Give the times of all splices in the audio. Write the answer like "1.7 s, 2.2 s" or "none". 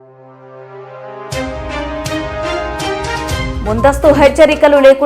3.5 s